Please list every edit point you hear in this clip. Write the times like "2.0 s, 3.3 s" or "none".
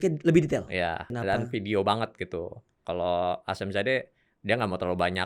1.2 s, 2.7 s